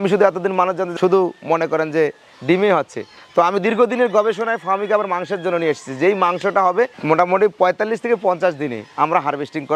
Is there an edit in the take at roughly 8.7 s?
no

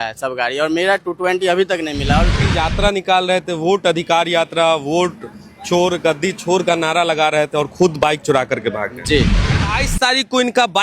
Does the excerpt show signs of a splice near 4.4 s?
no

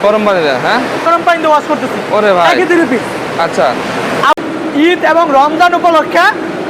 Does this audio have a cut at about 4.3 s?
yes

